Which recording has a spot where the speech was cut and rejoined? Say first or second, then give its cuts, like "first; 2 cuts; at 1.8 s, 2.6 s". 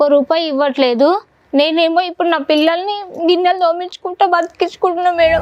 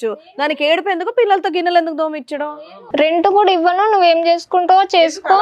second; 1 cut; at 2.4 s